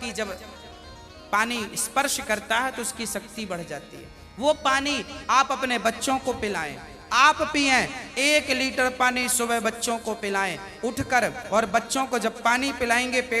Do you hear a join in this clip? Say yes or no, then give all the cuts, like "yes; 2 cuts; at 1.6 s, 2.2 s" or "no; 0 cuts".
no; 0 cuts